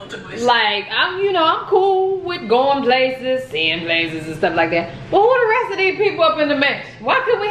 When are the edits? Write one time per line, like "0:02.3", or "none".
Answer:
none